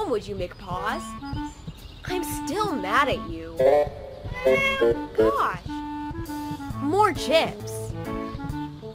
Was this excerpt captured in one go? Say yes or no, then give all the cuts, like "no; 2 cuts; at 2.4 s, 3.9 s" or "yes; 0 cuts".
yes; 0 cuts